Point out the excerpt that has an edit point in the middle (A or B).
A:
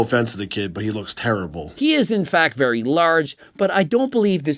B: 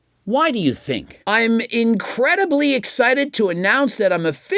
A